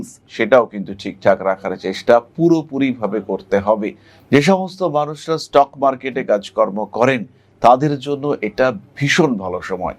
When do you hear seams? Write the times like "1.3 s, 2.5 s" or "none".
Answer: 4.1 s